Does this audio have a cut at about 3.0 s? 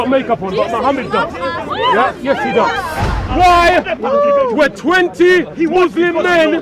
yes; 1 cut; at 3.0 s

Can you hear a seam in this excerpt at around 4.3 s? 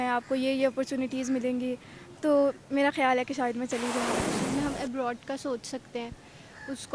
yes; 1 cut; at 4.3 s

